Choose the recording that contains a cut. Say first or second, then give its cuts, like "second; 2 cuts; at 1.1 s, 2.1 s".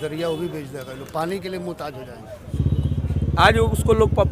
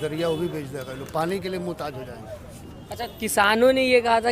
first; 1 cut; at 2.5 s